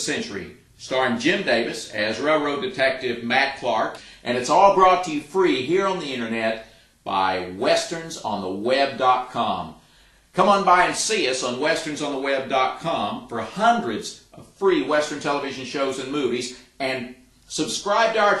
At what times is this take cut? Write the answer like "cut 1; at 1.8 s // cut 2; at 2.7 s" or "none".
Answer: cut 1; at 4.0 s